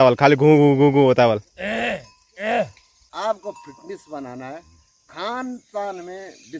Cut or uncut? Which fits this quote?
cut